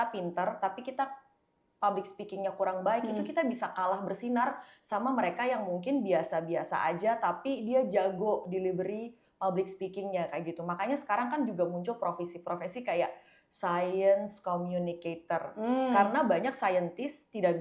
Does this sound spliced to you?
no; 0 cuts

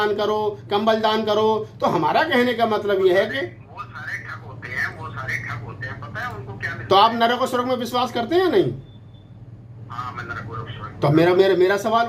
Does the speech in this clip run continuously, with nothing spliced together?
yes; 0 cuts

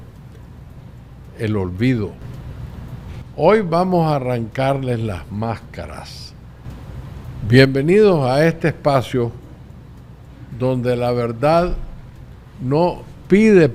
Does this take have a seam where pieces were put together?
no; 0 cuts

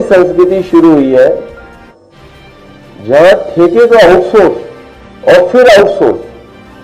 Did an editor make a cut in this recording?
no; 0 cuts

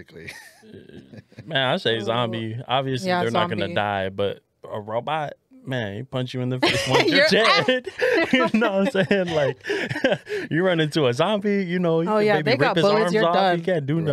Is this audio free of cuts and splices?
yes; 0 cuts

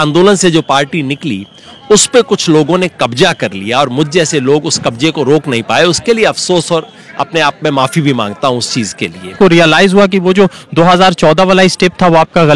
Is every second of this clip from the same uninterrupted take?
no; 1 cut; at 9.3 s

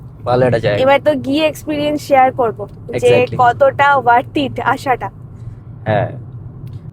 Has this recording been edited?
no; 0 cuts

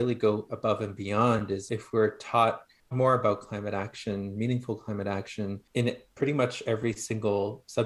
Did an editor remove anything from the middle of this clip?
yes; 3 cuts; at 1.6 s, 2.9 s, 5.6 s

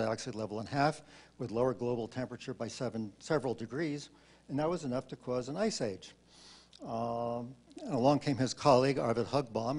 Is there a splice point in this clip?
no; 0 cuts

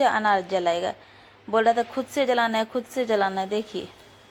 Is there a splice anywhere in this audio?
no; 0 cuts

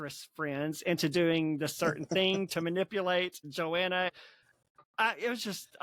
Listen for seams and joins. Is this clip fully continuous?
yes; 0 cuts

